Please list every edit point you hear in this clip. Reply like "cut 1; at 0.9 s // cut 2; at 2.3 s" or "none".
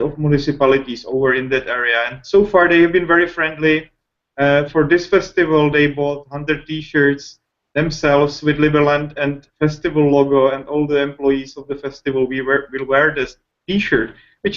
cut 1; at 7.7 s